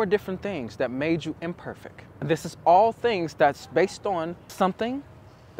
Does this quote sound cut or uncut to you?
cut